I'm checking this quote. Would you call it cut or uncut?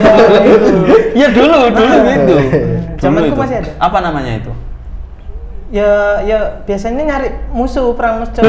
uncut